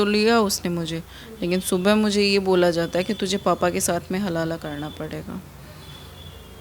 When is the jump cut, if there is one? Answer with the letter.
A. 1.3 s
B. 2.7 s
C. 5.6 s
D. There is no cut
D